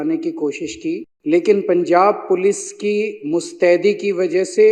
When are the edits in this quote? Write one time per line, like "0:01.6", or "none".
0:01.1